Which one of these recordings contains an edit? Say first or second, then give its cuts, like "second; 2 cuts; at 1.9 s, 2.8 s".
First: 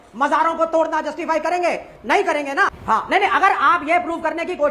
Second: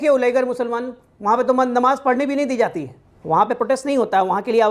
first; 1 cut; at 2.8 s